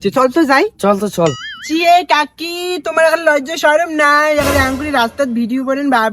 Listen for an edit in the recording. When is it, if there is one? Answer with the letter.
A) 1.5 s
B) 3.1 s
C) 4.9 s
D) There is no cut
A